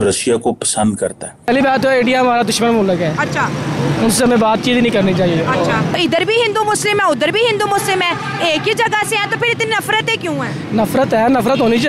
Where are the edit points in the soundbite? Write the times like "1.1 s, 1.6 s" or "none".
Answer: 1.5 s, 6.0 s